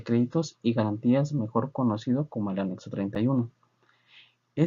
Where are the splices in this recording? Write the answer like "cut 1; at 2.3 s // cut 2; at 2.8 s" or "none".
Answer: cut 1; at 3.3 s